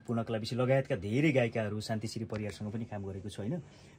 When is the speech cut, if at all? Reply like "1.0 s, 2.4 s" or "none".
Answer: none